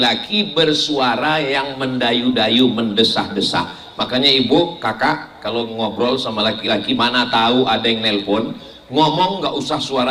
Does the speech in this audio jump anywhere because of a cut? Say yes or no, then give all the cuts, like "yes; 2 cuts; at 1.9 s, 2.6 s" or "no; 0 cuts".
no; 0 cuts